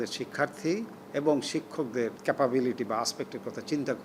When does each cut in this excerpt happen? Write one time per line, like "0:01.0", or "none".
0:01.0
0:02.2